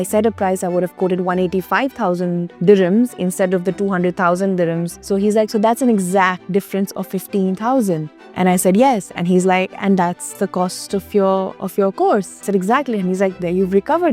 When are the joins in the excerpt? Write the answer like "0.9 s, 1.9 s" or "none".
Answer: 2.5 s, 4.9 s, 6.4 s, 10.3 s, 12.4 s